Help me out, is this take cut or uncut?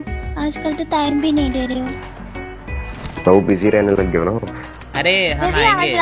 uncut